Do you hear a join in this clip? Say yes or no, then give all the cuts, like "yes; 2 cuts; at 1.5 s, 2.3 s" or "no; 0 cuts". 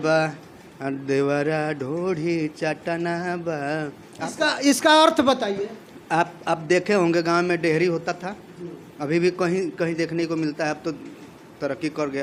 no; 0 cuts